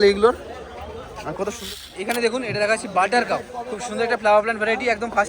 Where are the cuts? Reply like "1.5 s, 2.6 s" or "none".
1.6 s